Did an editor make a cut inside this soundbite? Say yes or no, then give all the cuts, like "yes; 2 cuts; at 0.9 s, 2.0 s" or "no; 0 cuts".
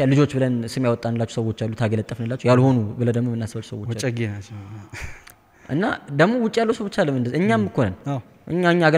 no; 0 cuts